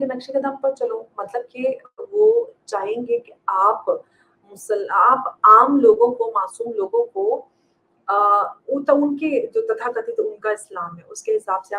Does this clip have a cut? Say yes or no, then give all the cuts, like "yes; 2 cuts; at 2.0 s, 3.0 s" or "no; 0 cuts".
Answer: no; 0 cuts